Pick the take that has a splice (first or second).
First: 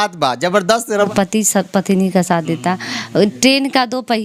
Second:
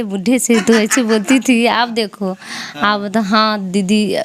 first